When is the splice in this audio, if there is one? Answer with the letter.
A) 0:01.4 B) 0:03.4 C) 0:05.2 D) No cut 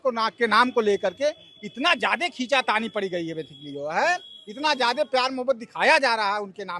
D